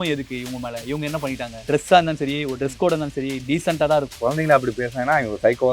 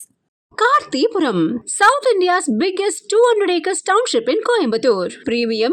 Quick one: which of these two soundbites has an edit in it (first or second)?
first